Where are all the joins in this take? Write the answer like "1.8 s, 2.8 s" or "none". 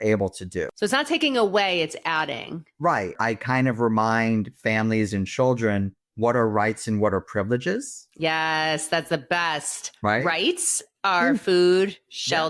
1.1 s, 3.1 s